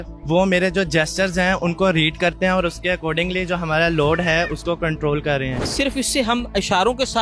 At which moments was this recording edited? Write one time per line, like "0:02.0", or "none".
0:05.7